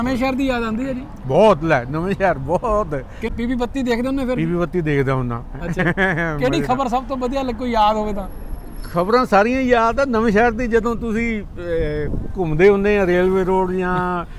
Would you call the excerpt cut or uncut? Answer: cut